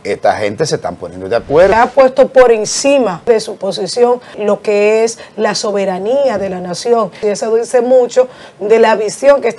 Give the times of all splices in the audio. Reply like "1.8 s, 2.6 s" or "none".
1.7 s, 3.3 s, 4.3 s, 7.2 s